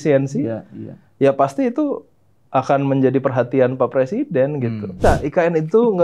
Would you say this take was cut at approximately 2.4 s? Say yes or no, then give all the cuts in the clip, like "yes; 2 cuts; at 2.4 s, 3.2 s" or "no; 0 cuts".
no; 1 cut; at 5.0 s